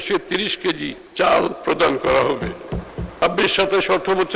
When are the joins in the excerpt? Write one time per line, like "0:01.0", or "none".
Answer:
0:01.0
0:03.2